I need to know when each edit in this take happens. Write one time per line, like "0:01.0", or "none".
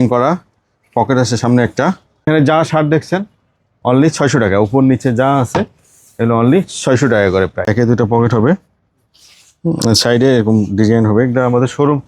0:02.3
0:07.7